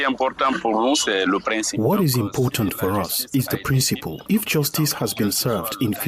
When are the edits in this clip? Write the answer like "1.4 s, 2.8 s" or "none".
4.1 s